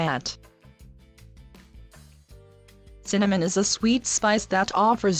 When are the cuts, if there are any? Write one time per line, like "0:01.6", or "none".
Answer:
0:03.2